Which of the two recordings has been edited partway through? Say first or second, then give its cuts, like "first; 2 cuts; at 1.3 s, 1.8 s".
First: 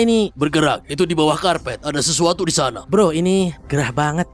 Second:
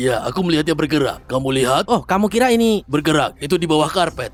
first; 1 cut; at 2.8 s